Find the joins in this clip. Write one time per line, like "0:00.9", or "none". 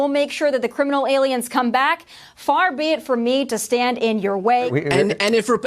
0:04.7